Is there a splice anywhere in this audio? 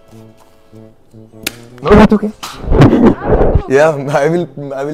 no; 0 cuts

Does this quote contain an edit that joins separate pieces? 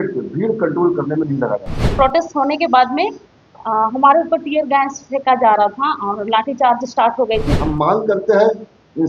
yes; 2 cuts; at 1.8 s, 7.5 s

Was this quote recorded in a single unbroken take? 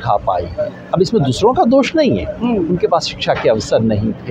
yes; 0 cuts

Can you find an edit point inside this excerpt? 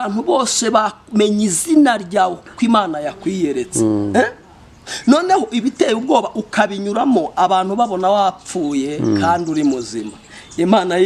no; 0 cuts

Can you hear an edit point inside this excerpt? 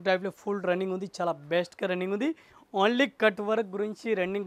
no; 0 cuts

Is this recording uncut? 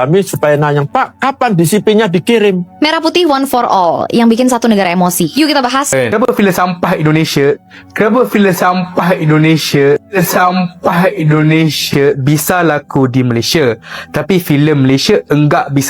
no; 2 cuts; at 2.8 s, 5.9 s

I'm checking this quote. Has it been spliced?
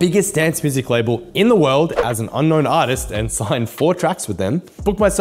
no; 0 cuts

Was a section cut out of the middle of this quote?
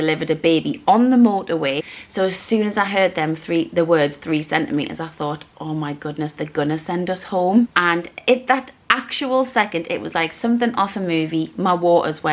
yes; 2 cuts; at 1.8 s, 7.8 s

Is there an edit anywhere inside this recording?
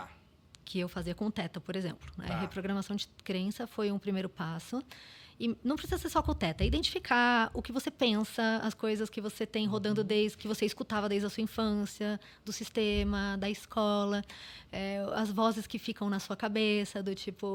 no; 0 cuts

